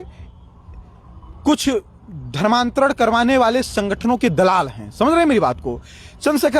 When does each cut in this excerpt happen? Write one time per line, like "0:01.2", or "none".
none